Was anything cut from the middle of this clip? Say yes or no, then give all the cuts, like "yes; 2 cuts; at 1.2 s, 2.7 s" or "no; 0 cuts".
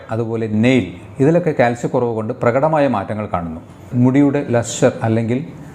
yes; 1 cut; at 3.8 s